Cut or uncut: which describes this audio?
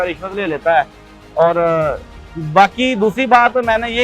uncut